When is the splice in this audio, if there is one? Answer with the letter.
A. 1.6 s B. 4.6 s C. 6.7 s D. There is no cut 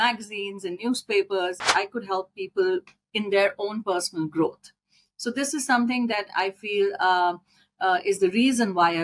A